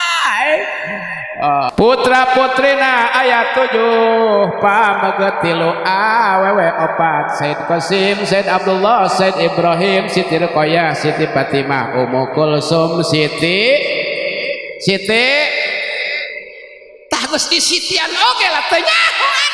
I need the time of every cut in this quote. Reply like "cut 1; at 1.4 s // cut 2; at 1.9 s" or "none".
cut 1; at 1.7 s